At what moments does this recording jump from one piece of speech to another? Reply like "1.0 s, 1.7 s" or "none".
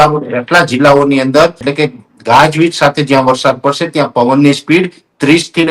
1.6 s

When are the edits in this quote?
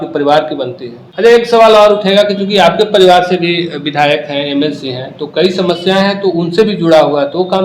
1.2 s

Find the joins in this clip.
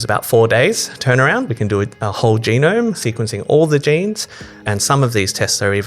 3.0 s, 4.6 s

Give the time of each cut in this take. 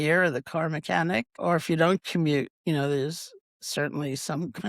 1.3 s

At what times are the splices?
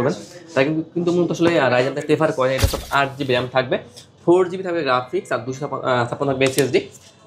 2.7 s

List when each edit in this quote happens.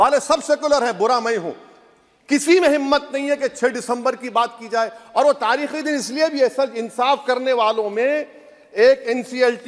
none

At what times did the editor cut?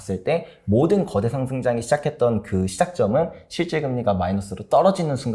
none

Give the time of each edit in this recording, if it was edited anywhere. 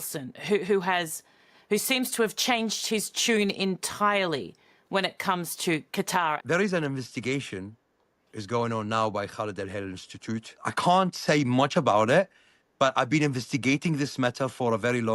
6.4 s, 10.6 s

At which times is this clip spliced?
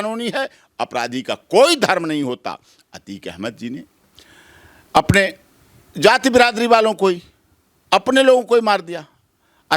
none

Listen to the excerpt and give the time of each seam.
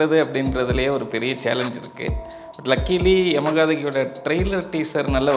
none

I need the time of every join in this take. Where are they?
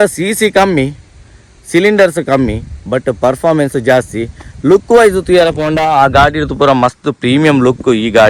none

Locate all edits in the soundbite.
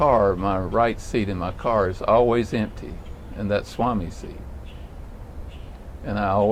none

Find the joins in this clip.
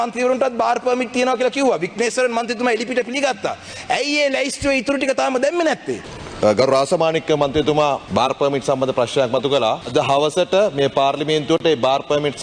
6.1 s, 8.0 s, 9.8 s

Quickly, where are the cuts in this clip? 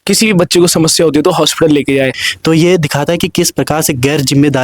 2.3 s

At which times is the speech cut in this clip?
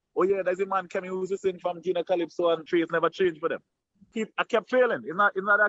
2.6 s, 4.1 s

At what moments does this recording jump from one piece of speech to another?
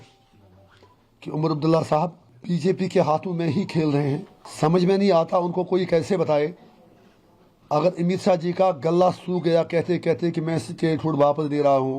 2.3 s, 4.4 s

